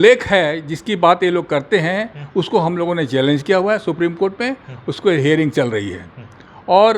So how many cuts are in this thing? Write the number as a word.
zero